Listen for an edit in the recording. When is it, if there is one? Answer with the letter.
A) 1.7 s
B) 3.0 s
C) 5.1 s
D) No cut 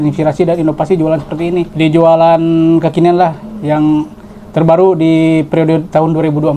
A